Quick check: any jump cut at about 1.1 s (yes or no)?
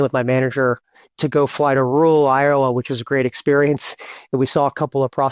yes